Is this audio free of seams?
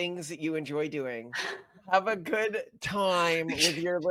yes; 0 cuts

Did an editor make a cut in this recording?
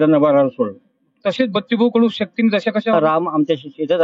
yes; 1 cut; at 2.9 s

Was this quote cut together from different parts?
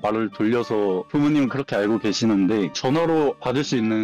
yes; 1 cut; at 2.7 s

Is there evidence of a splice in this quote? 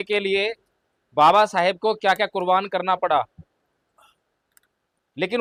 no; 0 cuts

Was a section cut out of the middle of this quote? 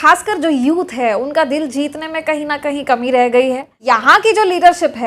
yes; 1 cut; at 3.8 s

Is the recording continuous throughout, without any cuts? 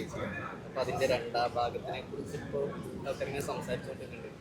yes; 0 cuts

